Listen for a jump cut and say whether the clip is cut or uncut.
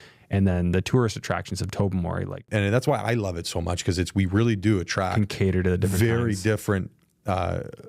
cut